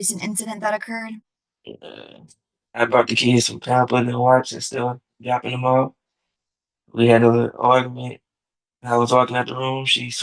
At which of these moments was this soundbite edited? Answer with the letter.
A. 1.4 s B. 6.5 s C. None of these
A